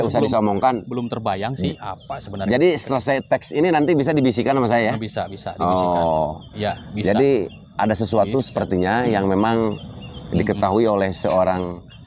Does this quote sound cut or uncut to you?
uncut